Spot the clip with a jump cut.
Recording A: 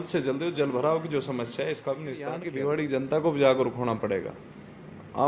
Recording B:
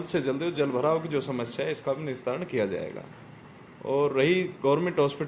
A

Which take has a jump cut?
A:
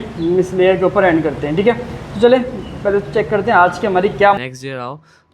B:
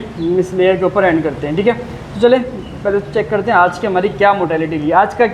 A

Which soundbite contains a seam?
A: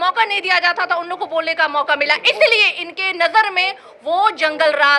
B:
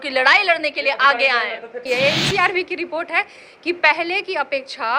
B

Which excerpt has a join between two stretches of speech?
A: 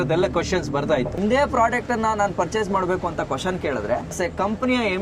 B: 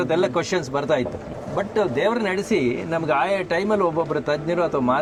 A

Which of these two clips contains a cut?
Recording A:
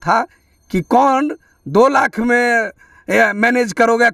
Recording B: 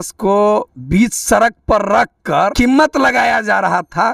B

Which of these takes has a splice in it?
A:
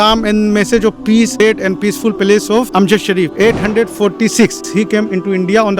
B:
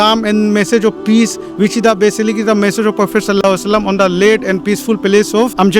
A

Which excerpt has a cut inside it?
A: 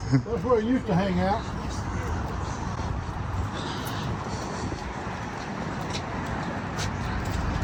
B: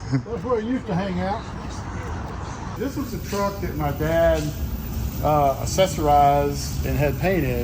B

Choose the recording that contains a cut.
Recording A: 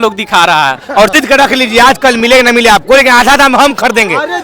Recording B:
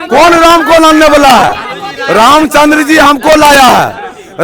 A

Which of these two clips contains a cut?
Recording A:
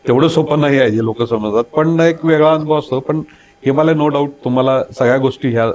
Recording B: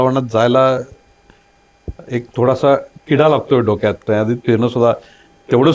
B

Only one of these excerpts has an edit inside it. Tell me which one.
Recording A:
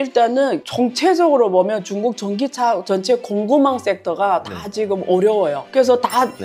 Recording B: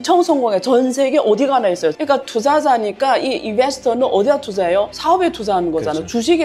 B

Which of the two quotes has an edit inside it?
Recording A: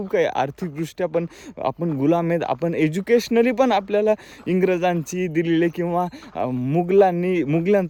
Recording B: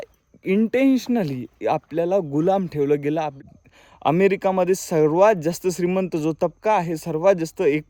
B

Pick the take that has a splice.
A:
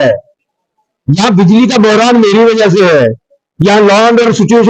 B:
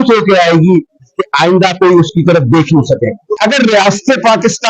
B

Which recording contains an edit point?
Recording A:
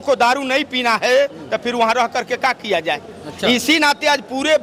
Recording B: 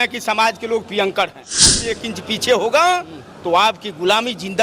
B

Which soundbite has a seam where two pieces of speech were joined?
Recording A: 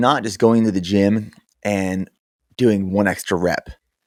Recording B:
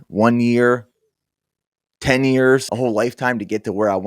B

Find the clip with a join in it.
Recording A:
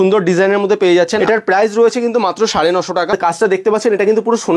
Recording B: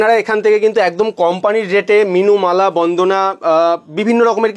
A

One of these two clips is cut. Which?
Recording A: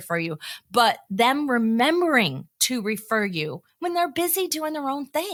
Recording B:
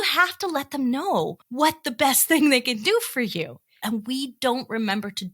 B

